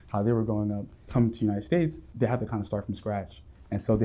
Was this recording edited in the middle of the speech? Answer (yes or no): yes